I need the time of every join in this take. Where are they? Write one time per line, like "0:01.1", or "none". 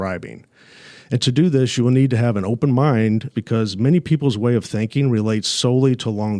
0:03.3